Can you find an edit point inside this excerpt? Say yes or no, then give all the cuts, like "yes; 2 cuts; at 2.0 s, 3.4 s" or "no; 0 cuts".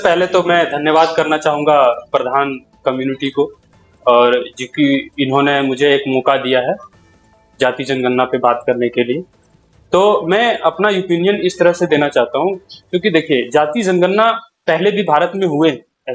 no; 0 cuts